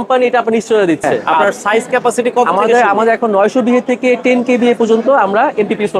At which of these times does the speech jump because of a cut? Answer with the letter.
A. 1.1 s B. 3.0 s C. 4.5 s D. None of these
A